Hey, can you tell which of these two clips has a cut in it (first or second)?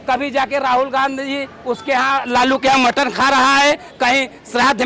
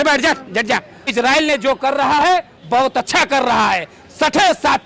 second